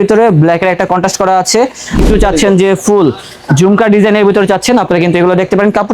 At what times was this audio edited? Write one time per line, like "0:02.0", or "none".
0:02.0